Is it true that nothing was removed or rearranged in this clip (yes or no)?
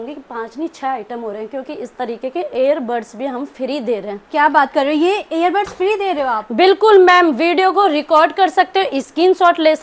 yes